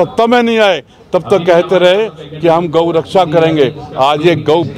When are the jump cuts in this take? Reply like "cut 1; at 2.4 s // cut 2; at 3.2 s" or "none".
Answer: none